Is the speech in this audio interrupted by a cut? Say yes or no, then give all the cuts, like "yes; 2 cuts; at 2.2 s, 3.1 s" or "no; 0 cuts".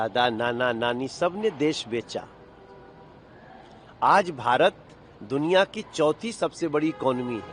no; 0 cuts